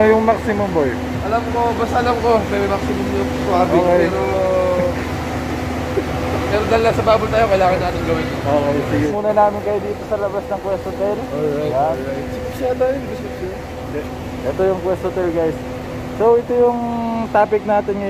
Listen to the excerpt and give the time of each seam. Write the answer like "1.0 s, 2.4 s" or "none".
9.1 s